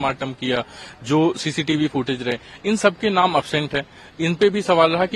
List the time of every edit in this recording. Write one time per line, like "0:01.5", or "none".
none